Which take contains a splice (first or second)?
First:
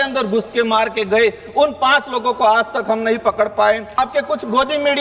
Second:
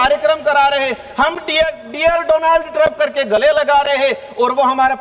first